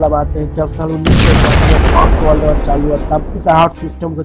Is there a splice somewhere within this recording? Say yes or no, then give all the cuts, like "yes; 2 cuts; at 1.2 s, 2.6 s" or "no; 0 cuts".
no; 0 cuts